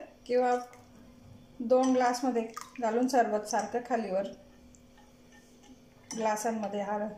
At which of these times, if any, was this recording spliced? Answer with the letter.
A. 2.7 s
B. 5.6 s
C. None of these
C